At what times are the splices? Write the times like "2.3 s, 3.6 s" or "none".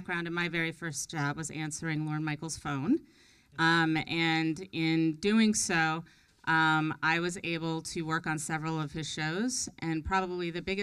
none